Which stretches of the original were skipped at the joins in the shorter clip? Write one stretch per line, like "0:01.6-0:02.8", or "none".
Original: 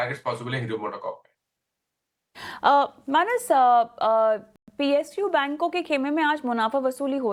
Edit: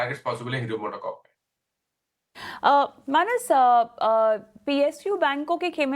0:04.5-0:04.6